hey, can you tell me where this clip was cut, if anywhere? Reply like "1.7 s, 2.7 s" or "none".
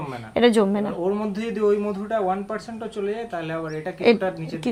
none